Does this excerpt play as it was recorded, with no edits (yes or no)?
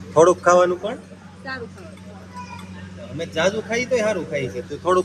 yes